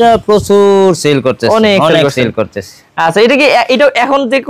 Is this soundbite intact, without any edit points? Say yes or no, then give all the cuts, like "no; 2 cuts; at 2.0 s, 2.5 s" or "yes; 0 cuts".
yes; 0 cuts